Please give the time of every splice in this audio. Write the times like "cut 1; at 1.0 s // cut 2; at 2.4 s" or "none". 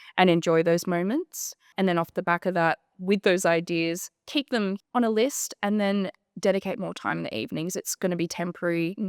cut 1; at 1.7 s // cut 2; at 4.8 s